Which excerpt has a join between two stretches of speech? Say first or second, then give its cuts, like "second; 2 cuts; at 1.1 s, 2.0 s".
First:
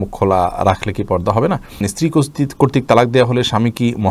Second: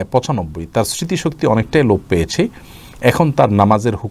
first; 1 cut; at 1.8 s